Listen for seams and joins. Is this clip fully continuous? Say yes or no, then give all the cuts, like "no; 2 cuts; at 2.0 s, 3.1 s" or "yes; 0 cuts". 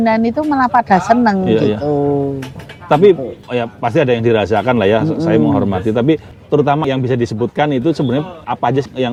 yes; 0 cuts